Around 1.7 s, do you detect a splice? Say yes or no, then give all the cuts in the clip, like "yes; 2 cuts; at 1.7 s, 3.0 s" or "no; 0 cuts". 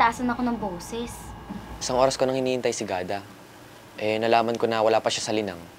yes; 1 cut; at 1.7 s